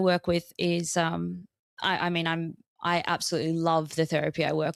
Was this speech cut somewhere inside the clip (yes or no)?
no